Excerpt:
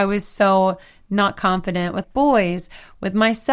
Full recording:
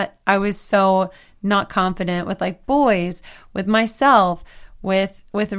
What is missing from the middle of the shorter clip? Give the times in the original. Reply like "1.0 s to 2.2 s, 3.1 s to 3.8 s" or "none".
2.4 s to 2.6 s